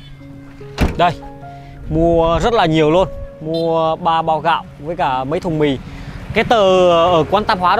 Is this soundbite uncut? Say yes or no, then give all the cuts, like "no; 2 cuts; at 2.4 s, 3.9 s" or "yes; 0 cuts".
yes; 0 cuts